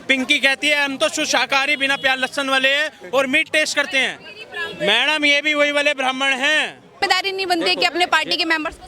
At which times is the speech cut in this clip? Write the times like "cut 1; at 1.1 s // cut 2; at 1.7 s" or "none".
cut 1; at 7.0 s